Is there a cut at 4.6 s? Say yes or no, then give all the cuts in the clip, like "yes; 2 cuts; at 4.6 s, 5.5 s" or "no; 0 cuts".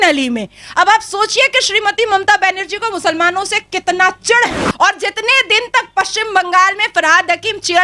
yes; 1 cut; at 4.6 s